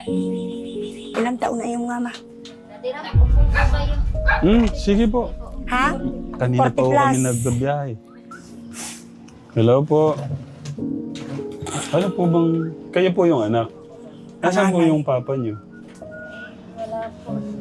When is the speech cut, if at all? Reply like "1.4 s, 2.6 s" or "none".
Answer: 0.9 s